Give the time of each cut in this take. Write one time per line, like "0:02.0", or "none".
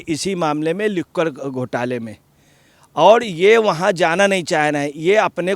none